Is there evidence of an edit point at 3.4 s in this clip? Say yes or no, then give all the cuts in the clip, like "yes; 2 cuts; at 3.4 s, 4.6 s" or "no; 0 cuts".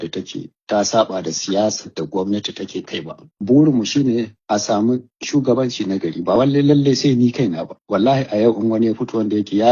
yes; 1 cut; at 3.4 s